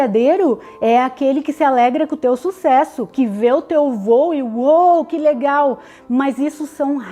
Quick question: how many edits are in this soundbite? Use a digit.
0